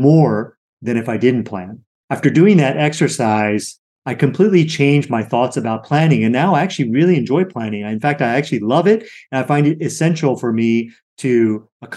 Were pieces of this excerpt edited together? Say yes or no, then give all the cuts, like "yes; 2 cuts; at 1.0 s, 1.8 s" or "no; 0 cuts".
no; 0 cuts